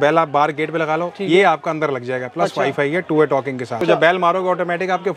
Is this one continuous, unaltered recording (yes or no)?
no